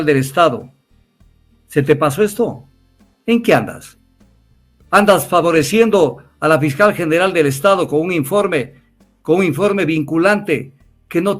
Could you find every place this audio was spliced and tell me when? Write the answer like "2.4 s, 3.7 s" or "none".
none